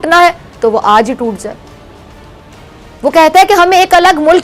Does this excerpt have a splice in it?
no; 0 cuts

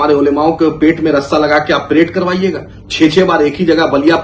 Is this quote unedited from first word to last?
yes; 0 cuts

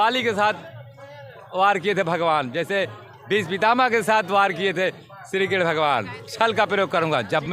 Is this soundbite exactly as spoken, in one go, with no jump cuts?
yes; 0 cuts

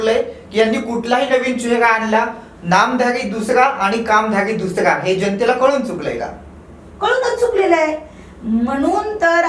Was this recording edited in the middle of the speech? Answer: no; 0 cuts

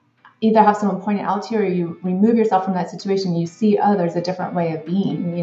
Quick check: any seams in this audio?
no; 0 cuts

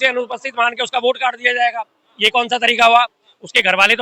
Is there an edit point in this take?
no; 0 cuts

